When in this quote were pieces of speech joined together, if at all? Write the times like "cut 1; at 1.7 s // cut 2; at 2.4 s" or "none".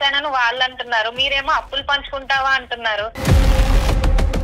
cut 1; at 3.2 s